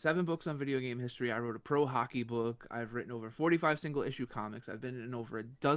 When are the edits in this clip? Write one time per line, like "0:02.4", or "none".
none